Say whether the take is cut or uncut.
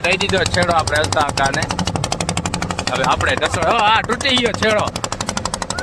uncut